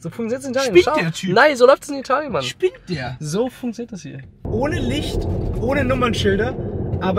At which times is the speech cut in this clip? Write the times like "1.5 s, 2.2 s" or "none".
4.4 s